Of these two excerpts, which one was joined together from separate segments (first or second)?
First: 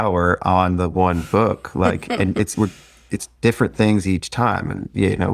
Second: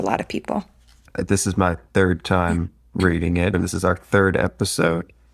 second